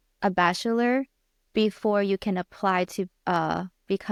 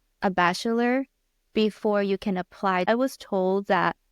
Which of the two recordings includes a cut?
second; 1 cut; at 2.9 s

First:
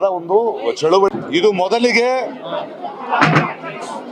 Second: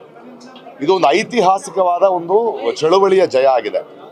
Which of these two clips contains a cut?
first; 1 cut; at 1.1 s

